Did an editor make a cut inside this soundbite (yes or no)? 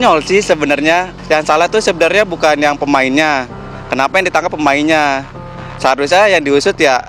yes